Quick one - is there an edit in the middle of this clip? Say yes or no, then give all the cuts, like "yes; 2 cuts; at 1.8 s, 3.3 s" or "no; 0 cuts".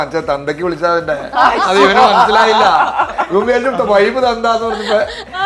no; 0 cuts